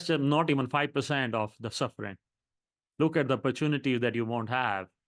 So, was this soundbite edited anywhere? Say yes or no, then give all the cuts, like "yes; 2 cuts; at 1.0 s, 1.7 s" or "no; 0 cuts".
no; 0 cuts